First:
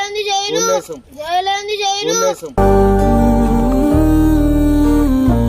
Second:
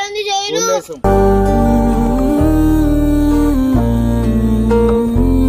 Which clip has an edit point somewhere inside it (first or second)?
second